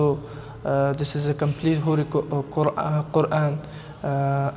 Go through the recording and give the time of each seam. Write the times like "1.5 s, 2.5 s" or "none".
none